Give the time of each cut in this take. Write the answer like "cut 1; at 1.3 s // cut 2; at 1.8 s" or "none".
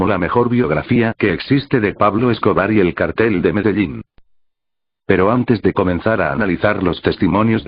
none

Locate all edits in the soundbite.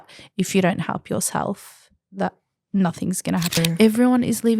cut 1; at 3.6 s

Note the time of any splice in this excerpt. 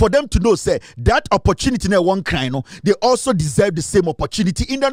none

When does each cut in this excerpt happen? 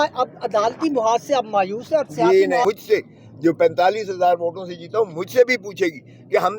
cut 1; at 2.6 s

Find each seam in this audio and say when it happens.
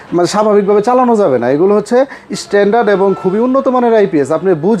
none

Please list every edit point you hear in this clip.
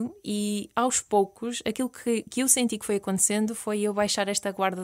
none

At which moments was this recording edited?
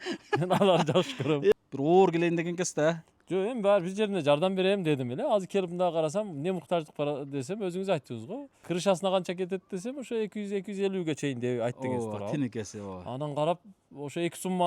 cut 1; at 1.5 s // cut 2; at 8.5 s

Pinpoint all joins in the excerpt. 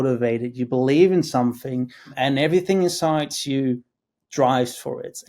cut 1; at 2.1 s

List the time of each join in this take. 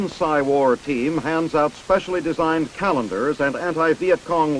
cut 1; at 2.1 s

